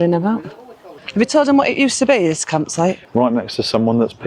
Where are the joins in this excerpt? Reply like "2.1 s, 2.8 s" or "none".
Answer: 1.0 s, 3.0 s